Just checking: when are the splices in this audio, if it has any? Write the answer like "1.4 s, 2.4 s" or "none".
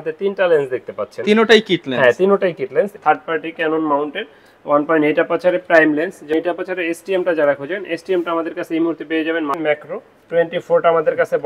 2.9 s, 6.3 s, 9.6 s